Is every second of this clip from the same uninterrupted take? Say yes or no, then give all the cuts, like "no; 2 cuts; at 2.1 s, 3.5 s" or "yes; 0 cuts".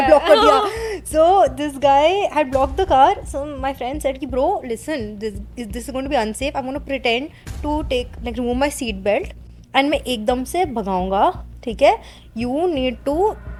yes; 0 cuts